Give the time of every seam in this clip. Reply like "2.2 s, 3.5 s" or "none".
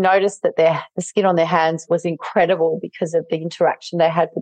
1.8 s